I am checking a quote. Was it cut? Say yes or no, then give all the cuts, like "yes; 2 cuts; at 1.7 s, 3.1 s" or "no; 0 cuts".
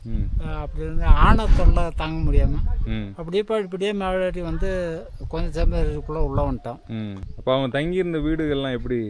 yes; 1 cut; at 7.2 s